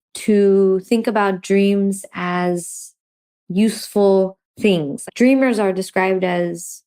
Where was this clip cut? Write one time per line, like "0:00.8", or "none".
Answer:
none